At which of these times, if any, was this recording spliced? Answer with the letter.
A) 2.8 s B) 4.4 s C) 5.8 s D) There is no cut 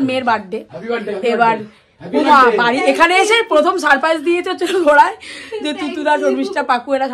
D